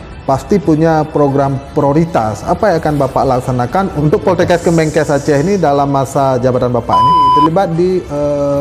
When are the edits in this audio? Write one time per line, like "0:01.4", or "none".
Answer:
0:03.9
0:07.3